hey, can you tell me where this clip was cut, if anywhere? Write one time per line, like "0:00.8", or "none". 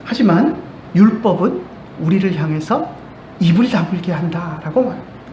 none